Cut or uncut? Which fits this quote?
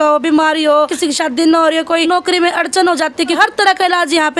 cut